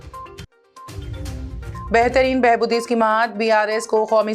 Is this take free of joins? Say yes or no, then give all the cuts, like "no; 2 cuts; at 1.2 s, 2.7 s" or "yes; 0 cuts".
no; 1 cut; at 1.2 s